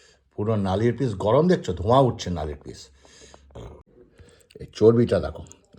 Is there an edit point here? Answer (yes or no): yes